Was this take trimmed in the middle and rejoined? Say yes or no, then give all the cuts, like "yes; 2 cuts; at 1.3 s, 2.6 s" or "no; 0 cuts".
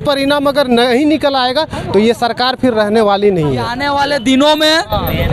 yes; 1 cut; at 3.7 s